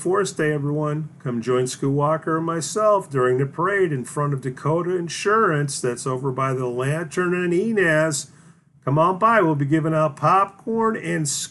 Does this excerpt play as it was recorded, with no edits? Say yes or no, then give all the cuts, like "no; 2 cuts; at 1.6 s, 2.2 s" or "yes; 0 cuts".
yes; 0 cuts